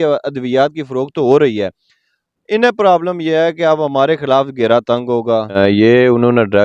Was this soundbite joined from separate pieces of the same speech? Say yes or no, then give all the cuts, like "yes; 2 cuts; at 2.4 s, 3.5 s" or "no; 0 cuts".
yes; 1 cut; at 5.5 s